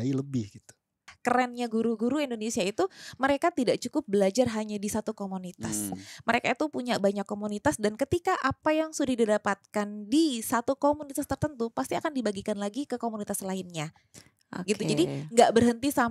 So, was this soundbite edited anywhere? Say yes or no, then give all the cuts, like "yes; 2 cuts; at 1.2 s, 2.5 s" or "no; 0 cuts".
yes; 1 cut; at 1.1 s